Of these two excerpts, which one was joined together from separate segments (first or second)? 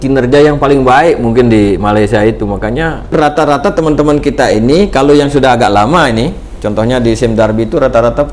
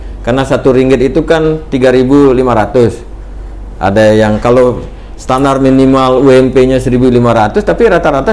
first